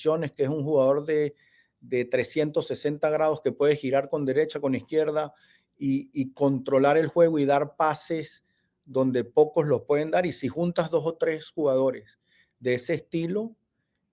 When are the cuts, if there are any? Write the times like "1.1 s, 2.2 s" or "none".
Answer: none